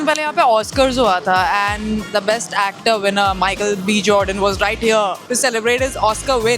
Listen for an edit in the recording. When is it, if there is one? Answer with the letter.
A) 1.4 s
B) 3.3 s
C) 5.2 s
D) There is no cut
C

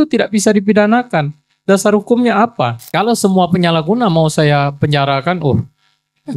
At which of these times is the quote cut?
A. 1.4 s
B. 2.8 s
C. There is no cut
B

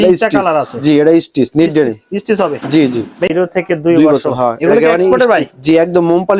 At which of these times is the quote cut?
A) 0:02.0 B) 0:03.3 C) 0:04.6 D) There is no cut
B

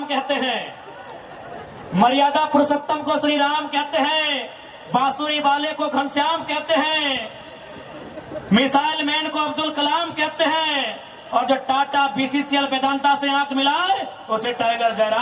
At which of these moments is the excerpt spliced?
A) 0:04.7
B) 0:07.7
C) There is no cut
C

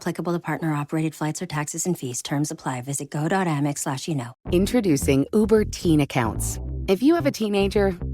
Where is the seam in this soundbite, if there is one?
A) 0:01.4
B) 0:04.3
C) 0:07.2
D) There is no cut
B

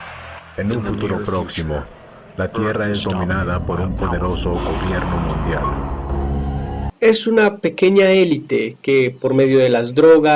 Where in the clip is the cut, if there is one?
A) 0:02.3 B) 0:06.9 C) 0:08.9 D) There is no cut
B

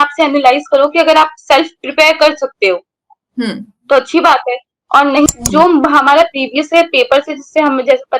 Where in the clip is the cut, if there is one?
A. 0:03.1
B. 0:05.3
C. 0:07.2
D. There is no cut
B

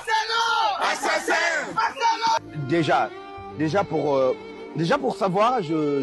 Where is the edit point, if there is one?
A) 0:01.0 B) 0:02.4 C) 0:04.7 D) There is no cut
B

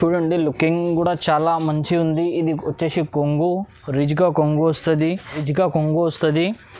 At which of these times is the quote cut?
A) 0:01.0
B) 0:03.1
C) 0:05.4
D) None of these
C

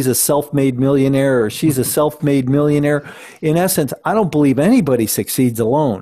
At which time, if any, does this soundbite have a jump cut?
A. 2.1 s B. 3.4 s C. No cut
C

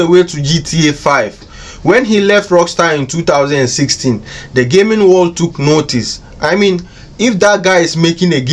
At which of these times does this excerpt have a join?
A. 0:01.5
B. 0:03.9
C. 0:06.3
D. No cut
D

